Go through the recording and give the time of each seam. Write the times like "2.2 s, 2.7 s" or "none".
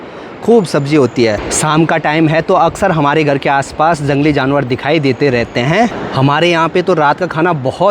1.5 s, 5.9 s

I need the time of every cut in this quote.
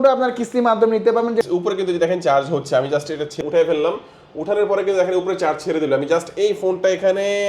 1.4 s, 3.4 s

